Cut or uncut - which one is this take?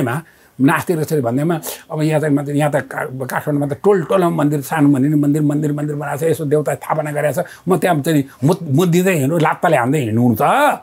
uncut